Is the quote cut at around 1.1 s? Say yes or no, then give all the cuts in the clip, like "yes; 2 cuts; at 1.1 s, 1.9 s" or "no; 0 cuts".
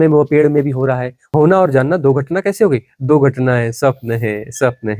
yes; 1 cut; at 1.1 s